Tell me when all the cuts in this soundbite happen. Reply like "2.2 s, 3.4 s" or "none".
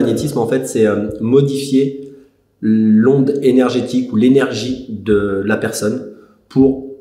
none